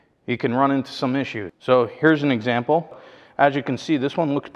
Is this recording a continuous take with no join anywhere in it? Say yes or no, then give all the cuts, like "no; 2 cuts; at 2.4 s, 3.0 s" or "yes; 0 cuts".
no; 2 cuts; at 1.5 s, 3.0 s